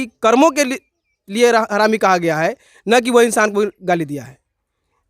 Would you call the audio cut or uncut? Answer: uncut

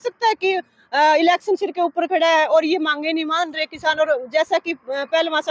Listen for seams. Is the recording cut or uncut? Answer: uncut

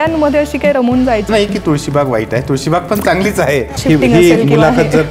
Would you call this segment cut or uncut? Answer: cut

